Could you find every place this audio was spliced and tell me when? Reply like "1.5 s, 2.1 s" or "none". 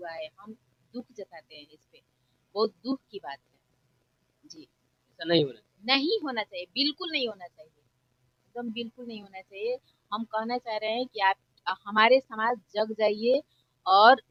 none